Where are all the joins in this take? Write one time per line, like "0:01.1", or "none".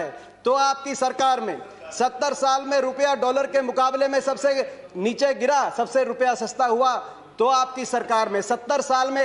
none